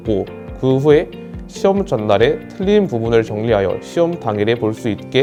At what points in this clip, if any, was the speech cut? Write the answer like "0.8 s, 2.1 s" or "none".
none